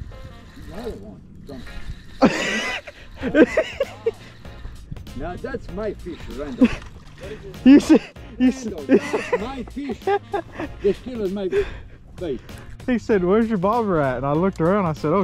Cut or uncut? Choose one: uncut